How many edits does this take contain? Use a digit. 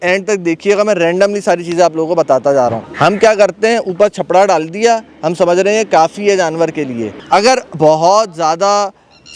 2